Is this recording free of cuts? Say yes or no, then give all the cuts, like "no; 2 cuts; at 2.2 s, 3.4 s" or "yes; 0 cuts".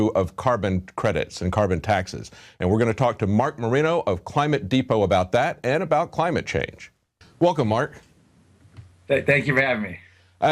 no; 1 cut; at 5.0 s